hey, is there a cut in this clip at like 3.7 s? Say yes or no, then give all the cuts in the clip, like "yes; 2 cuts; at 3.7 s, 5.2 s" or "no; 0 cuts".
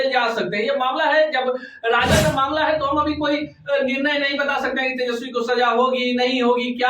no; 1 cut; at 2.1 s